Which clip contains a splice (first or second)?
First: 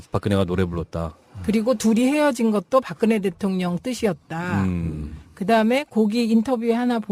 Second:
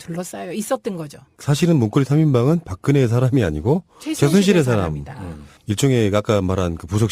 second